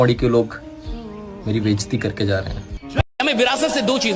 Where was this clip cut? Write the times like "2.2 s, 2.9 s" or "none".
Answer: 3.1 s